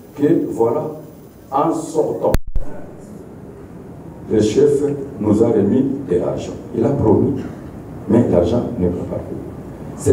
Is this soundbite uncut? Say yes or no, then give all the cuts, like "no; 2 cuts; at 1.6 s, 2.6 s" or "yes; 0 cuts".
yes; 0 cuts